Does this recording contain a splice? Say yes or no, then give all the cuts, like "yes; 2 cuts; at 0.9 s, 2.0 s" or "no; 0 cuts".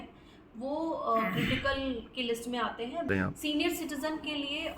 yes; 1 cut; at 3.1 s